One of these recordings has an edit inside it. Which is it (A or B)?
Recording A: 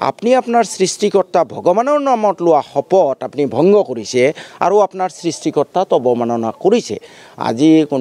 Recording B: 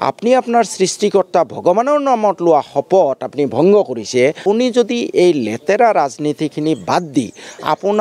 B